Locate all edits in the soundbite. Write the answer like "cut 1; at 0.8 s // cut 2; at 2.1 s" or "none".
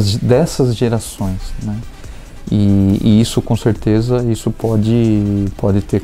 none